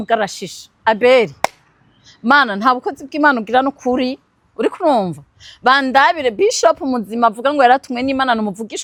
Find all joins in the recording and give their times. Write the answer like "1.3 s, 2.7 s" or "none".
none